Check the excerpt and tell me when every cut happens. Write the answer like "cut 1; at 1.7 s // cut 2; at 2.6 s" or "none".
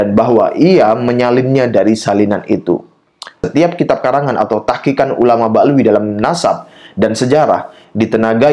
cut 1; at 3.5 s